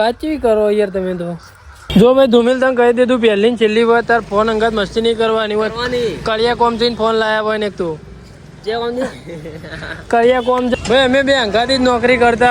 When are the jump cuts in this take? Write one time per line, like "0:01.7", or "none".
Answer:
0:01.8
0:10.7